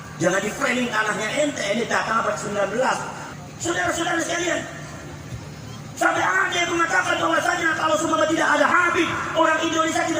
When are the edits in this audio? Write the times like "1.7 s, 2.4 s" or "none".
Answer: 3.2 s